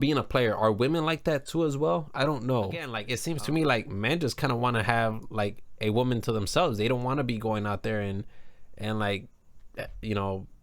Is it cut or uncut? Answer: cut